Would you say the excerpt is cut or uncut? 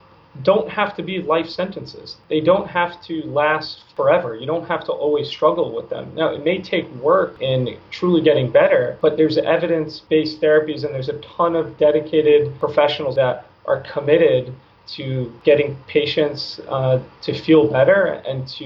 cut